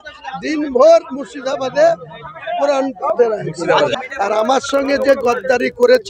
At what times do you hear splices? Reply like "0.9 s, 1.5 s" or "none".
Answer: 3.9 s